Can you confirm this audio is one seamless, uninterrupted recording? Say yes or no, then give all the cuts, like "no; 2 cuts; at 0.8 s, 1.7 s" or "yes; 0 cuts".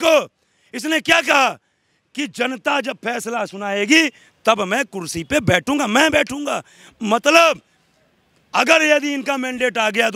yes; 0 cuts